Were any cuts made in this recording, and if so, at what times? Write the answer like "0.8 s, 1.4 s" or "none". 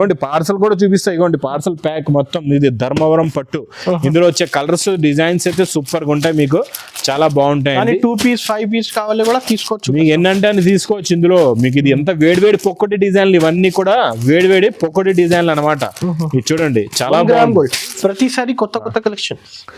17.9 s